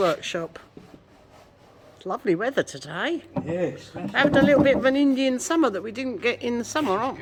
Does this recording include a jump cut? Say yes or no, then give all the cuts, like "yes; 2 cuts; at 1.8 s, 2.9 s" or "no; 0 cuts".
no; 0 cuts